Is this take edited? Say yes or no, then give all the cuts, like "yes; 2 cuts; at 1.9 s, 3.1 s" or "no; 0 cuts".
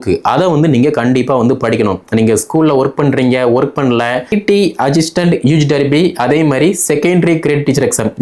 yes; 1 cut; at 4.3 s